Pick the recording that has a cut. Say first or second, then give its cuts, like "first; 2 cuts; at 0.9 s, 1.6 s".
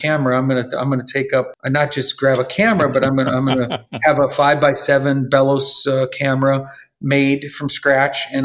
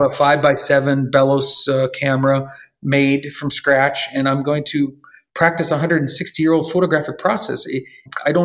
first; 1 cut; at 1.5 s